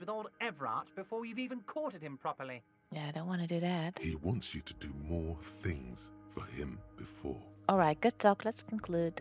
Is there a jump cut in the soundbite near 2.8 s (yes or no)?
no